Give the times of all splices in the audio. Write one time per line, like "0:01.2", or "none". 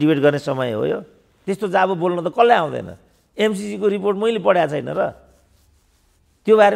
0:01.4